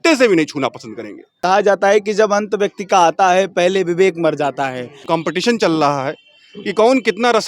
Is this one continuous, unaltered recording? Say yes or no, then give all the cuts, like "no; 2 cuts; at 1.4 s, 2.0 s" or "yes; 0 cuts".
no; 2 cuts; at 1.4 s, 5.0 s